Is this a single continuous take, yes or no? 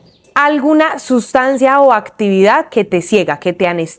yes